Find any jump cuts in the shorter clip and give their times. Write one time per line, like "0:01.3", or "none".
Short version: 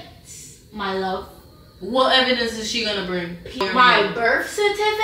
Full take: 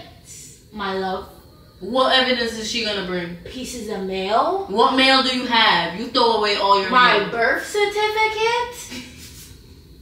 0:03.6